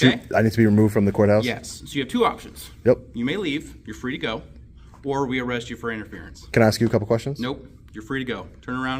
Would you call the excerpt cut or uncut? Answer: uncut